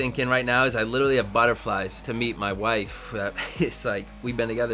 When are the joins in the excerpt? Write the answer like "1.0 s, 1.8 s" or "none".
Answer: none